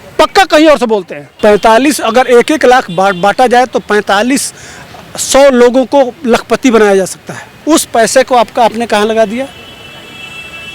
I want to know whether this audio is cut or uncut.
cut